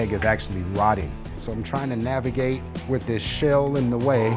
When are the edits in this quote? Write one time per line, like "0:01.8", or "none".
0:01.3